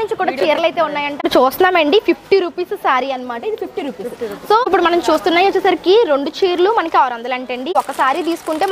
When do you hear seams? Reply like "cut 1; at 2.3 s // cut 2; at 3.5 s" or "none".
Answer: cut 1; at 1.2 s // cut 2; at 4.7 s // cut 3; at 7.7 s